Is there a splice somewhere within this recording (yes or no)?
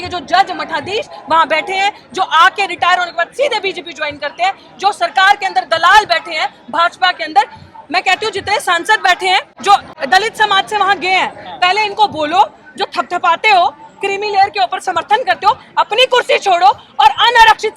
yes